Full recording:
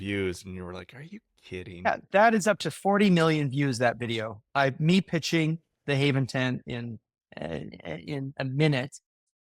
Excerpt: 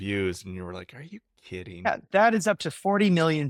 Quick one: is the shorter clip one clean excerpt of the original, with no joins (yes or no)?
yes